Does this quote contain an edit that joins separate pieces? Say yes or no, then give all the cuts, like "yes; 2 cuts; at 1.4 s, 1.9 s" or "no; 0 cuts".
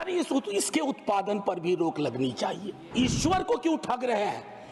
yes; 1 cut; at 2.8 s